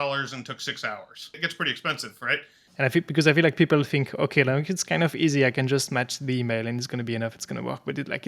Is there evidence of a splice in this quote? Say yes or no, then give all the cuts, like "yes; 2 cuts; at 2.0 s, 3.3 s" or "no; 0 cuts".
yes; 2 cuts; at 1.4 s, 2.6 s